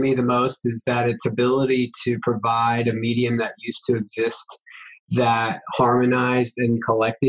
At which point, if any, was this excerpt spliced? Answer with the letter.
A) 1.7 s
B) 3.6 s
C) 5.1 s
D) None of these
D